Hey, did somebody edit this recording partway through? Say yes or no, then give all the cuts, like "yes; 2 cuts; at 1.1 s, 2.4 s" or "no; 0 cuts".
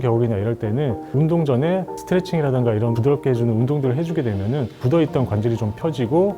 yes; 1 cut; at 1.0 s